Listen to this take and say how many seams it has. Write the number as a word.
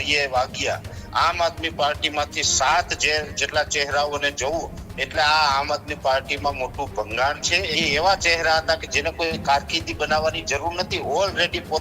two